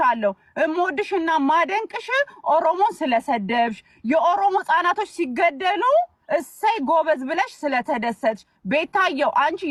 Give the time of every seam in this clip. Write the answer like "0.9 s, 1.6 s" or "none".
none